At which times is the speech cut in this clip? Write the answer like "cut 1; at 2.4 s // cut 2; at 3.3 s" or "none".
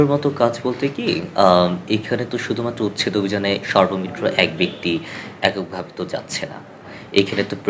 none